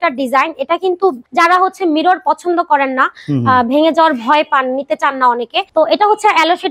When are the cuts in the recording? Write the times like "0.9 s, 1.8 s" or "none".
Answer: 1.2 s, 5.6 s